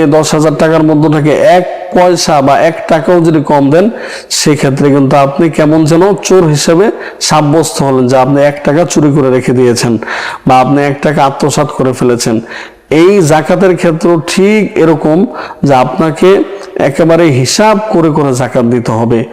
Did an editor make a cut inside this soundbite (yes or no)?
no